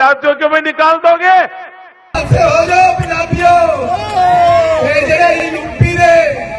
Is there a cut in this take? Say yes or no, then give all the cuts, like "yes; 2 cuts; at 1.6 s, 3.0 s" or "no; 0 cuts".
yes; 1 cut; at 2.2 s